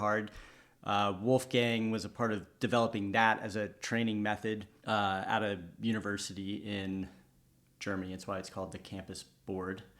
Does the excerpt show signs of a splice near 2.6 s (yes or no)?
no